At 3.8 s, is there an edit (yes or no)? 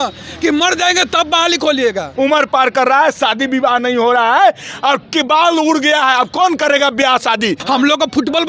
no